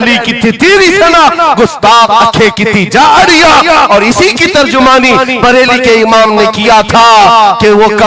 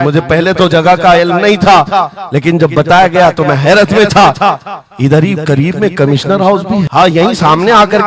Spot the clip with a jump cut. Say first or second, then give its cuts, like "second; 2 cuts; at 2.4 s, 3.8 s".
second; 1 cut; at 6.9 s